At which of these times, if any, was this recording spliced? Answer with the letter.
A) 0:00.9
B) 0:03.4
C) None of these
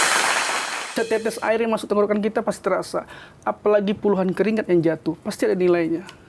A